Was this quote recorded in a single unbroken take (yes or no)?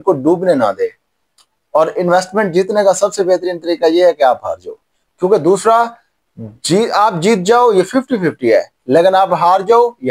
yes